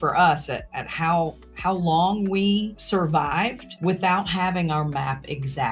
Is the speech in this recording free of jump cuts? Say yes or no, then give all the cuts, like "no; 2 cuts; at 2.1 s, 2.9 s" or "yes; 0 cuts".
no; 2 cuts; at 2.8 s, 3.7 s